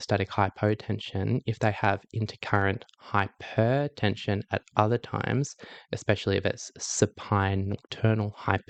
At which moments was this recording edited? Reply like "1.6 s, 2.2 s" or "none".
none